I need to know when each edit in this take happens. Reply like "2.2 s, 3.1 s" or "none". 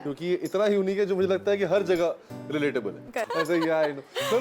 3.3 s